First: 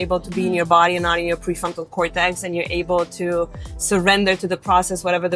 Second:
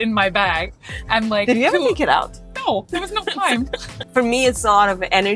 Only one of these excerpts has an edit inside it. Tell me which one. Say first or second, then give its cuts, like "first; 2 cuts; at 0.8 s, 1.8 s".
second; 1 cut; at 4.0 s